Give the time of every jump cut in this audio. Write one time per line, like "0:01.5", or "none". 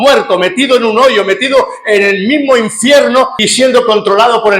0:03.4